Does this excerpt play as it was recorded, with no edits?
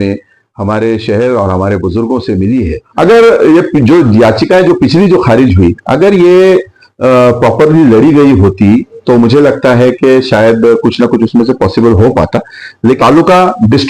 no; 2 cuts; at 2.8 s, 13.0 s

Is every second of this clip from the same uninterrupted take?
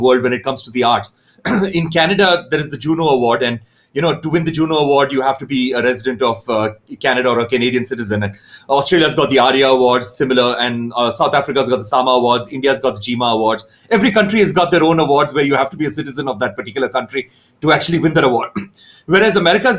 yes; 0 cuts

